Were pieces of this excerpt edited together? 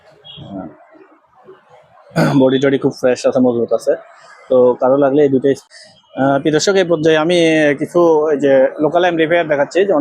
yes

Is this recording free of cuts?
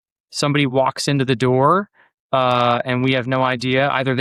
yes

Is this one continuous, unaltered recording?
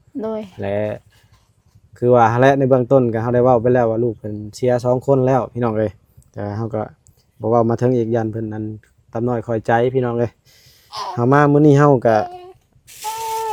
yes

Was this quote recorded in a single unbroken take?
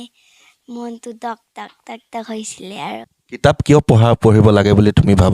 no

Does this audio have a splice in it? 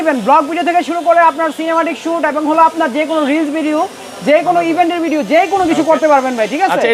no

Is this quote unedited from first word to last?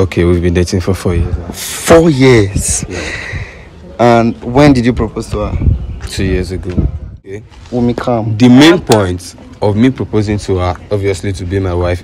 no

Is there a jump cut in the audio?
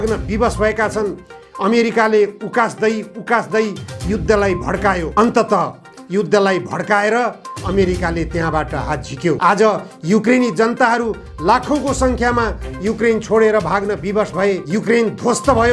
yes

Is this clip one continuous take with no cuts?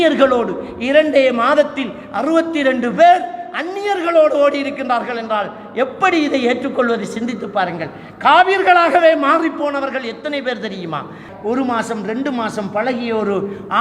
no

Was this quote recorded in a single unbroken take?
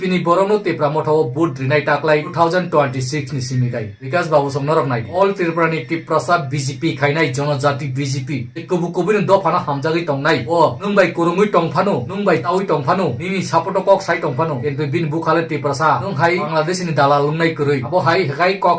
no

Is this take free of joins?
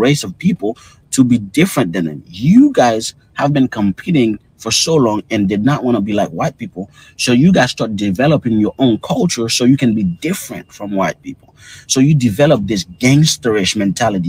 no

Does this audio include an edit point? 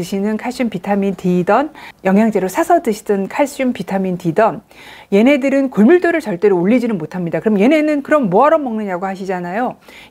no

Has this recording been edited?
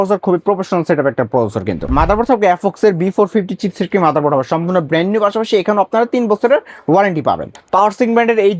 yes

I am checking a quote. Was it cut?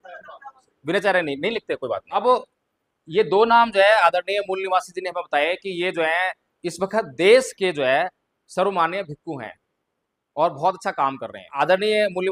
yes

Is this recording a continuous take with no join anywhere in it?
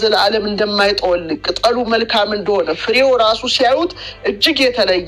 yes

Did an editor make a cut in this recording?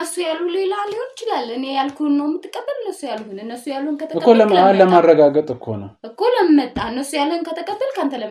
no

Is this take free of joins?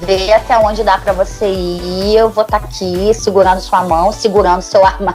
yes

